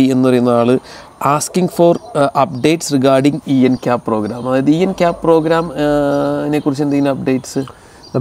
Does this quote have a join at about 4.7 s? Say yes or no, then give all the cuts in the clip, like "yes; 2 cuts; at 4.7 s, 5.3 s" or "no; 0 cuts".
no; 0 cuts